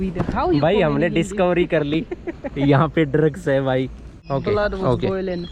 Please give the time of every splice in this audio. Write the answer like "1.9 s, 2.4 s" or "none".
4.1 s